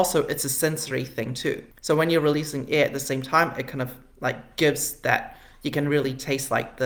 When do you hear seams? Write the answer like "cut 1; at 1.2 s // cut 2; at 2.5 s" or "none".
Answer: none